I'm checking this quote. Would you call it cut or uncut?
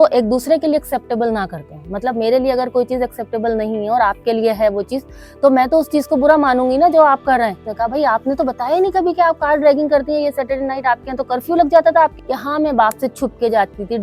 cut